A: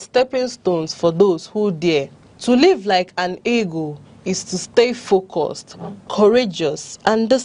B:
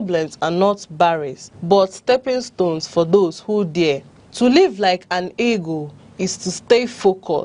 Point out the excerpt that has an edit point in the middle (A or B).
A